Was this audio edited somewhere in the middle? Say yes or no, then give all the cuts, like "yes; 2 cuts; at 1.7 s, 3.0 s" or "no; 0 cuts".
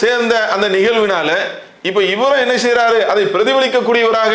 no; 0 cuts